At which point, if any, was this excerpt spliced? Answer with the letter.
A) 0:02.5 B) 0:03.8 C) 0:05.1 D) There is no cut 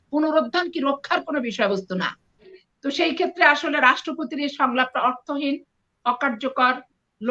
A